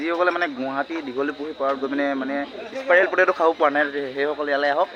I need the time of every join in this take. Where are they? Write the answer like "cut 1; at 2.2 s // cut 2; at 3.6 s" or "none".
none